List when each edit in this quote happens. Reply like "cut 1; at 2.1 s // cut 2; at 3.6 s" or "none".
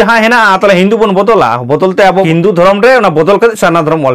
cut 1; at 2.2 s